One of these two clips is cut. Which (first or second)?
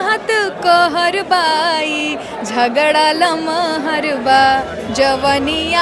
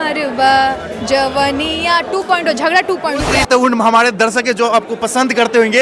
second